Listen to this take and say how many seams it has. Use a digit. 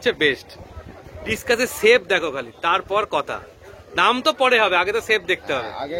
0